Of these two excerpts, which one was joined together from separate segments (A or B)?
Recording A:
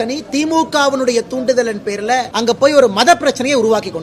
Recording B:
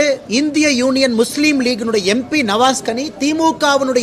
A